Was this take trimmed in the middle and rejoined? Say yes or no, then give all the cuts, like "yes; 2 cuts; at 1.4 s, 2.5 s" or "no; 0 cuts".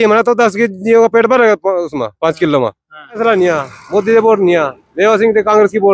yes; 1 cut; at 3.2 s